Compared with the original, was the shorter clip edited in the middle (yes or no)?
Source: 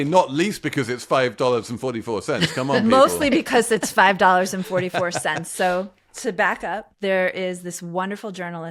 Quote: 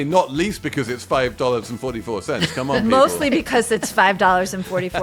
no